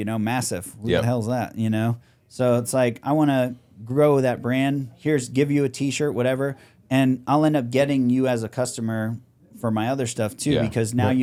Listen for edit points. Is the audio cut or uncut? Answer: uncut